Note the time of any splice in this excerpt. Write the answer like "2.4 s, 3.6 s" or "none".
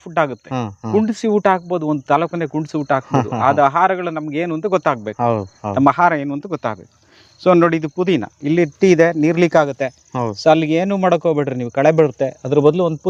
none